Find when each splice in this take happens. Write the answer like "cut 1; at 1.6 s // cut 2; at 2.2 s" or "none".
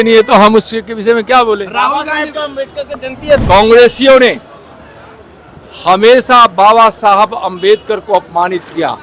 cut 1; at 3.4 s